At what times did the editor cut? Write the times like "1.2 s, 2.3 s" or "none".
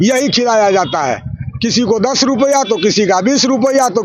none